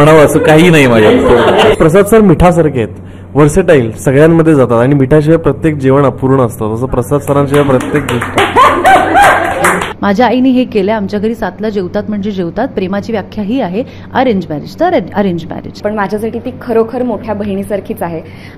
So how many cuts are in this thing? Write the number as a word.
three